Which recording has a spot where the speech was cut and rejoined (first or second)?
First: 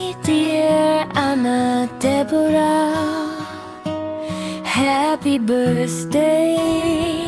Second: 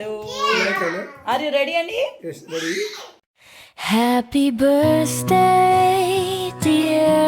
second